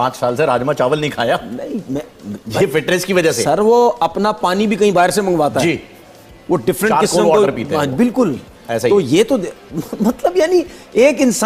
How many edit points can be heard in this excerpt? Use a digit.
0